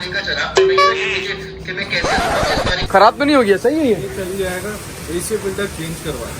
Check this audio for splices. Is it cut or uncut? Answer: cut